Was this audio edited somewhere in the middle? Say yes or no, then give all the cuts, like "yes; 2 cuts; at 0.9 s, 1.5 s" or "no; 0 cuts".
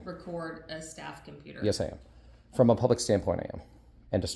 no; 0 cuts